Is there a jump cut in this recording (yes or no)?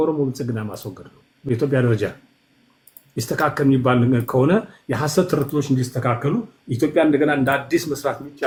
no